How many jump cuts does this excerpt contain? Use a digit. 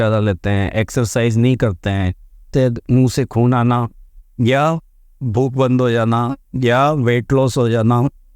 1